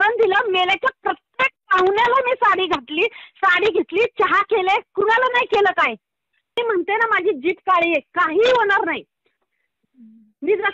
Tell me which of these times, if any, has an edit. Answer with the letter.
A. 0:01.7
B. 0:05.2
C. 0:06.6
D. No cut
C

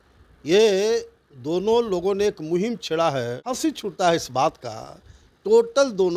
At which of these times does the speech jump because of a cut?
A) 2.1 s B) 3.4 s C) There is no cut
B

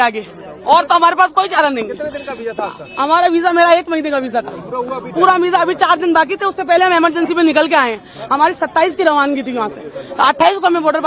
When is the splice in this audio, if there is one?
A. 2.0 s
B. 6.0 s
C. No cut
C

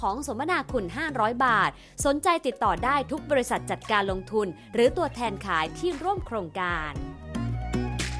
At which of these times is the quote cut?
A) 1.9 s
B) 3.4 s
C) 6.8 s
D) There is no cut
C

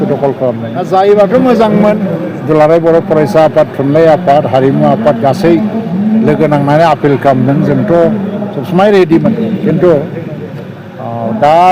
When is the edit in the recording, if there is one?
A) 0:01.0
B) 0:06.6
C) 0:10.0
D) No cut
A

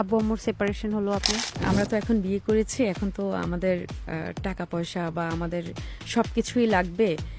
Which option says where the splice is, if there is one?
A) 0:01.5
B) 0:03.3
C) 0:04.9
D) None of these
A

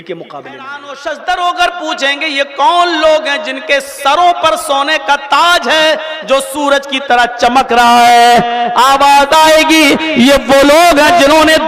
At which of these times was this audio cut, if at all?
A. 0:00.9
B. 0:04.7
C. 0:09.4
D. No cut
A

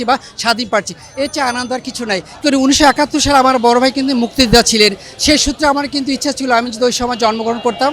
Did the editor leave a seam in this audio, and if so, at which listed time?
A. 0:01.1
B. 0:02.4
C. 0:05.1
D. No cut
B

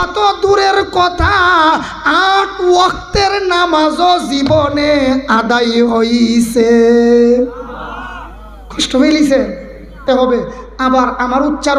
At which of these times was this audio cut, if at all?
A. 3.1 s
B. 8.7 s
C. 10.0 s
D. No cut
C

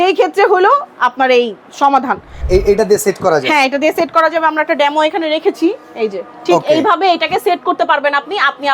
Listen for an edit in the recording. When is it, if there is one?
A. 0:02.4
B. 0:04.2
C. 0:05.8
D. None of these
A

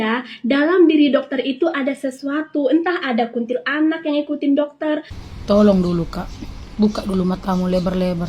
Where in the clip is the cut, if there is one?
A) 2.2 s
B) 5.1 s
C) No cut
B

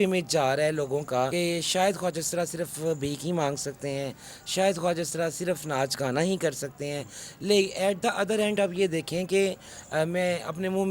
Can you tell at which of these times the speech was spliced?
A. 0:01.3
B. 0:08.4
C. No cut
A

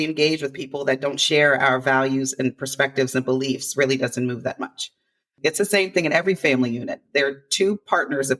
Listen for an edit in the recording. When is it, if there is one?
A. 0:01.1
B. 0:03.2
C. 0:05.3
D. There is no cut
C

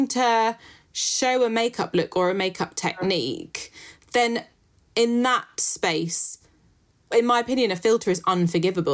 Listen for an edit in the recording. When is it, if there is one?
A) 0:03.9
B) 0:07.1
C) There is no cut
B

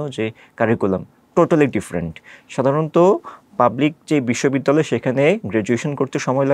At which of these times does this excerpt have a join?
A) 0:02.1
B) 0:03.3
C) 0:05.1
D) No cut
D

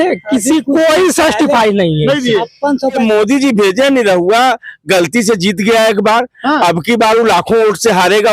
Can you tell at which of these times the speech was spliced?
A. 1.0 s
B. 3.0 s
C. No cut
B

